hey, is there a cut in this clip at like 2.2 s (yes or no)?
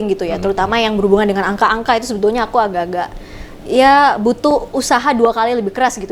no